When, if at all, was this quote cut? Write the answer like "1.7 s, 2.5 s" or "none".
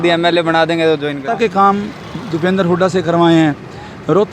1.3 s